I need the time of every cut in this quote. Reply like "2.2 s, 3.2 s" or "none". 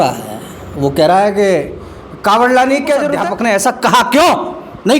3.2 s